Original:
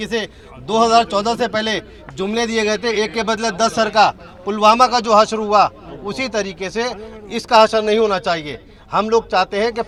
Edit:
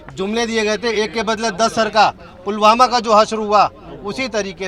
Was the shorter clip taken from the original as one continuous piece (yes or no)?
yes